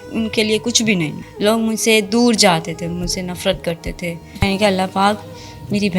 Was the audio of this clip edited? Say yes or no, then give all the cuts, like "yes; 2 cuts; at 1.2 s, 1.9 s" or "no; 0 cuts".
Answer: yes; 2 cuts; at 1.2 s, 4.4 s